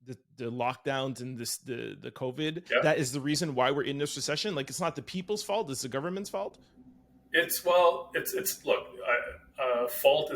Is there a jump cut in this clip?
yes; 1 cut; at 2.6 s

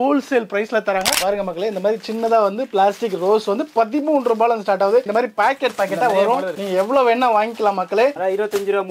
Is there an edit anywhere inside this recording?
yes; 4 cuts; at 1.1 s, 5.1 s, 6.6 s, 8.1 s

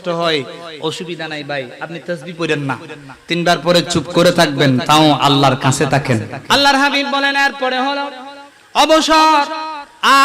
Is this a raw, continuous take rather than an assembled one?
no; 1 cut; at 6.4 s

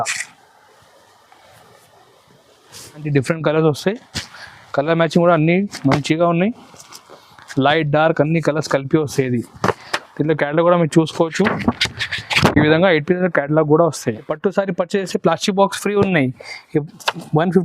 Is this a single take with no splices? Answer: no; 3 cuts; at 3.0 s, 9.9 s, 14.3 s

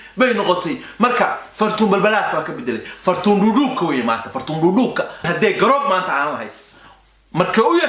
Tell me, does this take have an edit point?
yes; 1 cut; at 5.2 s

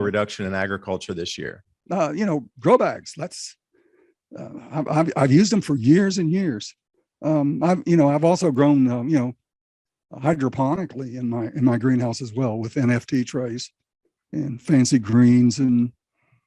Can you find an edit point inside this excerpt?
yes; 1 cut; at 1.6 s

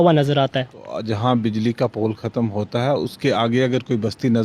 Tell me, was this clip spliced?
yes; 1 cut; at 0.9 s

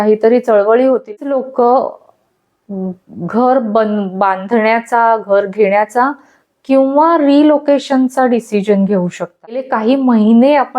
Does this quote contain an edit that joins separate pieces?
yes; 2 cuts; at 1.2 s, 9.7 s

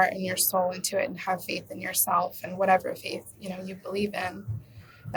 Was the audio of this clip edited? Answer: no; 0 cuts

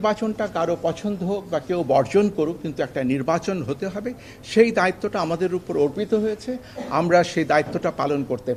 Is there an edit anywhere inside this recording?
no; 0 cuts

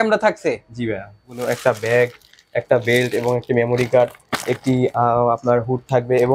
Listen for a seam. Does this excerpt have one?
yes; 1 cut; at 1.4 s

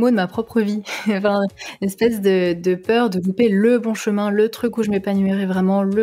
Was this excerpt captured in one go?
yes; 0 cuts

